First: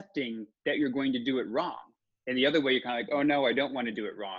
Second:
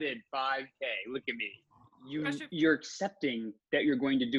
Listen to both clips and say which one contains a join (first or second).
second